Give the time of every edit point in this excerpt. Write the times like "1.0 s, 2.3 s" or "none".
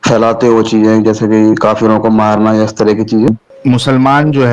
3.3 s